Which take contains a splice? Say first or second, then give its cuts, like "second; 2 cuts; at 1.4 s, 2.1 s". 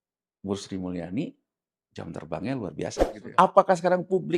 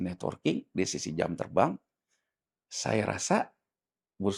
first; 1 cut; at 3.1 s